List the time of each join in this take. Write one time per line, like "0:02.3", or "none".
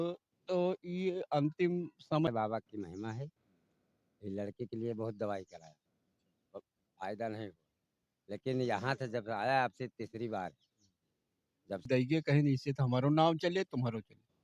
0:02.3
0:11.9